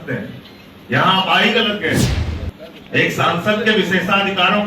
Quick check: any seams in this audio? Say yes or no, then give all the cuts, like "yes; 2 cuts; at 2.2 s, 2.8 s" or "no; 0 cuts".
yes; 1 cut; at 2.2 s